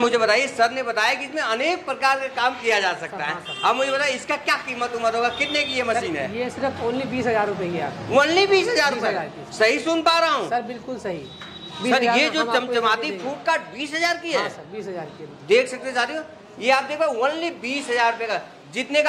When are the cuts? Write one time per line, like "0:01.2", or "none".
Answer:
none